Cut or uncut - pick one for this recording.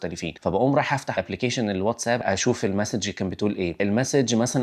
cut